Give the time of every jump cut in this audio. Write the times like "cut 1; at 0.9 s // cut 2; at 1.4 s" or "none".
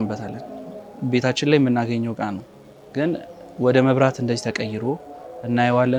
none